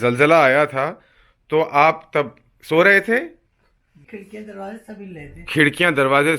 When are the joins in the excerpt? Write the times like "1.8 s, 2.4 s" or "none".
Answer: 4.0 s